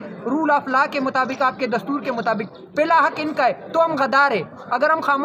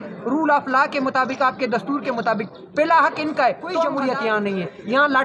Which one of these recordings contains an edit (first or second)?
second